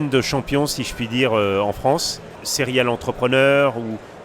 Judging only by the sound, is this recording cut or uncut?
cut